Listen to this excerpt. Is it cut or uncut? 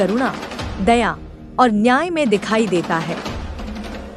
uncut